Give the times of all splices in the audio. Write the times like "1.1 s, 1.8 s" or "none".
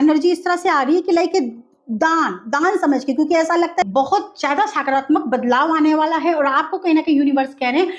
3.8 s